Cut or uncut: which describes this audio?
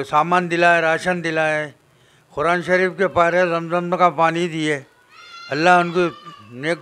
uncut